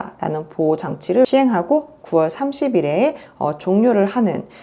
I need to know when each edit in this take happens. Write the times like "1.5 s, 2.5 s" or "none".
1.3 s